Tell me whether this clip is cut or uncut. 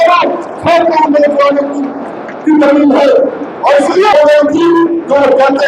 cut